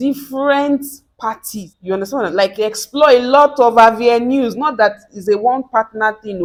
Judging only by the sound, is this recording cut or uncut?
uncut